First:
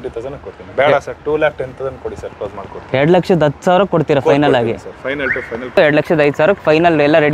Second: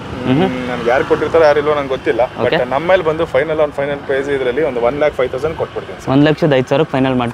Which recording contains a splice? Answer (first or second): first